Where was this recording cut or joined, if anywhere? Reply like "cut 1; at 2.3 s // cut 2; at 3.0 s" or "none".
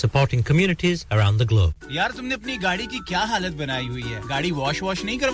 cut 1; at 1.7 s